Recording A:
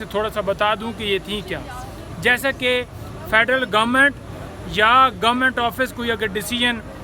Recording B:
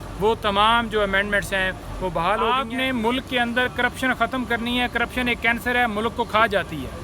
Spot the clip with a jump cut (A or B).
B